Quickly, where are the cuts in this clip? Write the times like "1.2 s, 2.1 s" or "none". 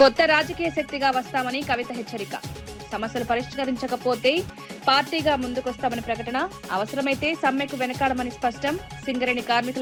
none